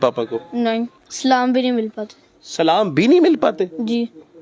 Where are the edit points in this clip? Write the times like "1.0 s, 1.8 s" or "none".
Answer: 1.0 s